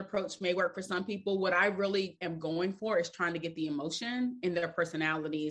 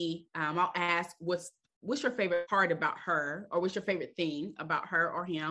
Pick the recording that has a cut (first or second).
second